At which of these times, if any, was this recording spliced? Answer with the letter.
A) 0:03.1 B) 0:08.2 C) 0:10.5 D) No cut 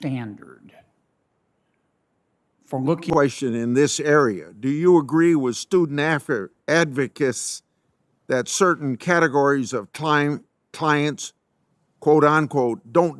A